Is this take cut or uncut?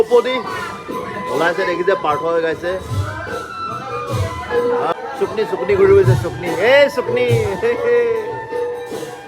cut